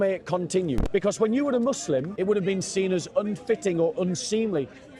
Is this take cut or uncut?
cut